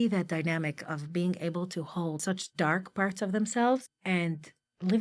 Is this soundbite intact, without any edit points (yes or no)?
no